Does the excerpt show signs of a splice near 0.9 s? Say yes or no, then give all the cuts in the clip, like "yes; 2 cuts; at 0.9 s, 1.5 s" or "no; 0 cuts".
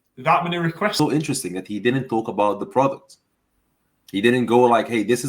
yes; 1 cut; at 0.9 s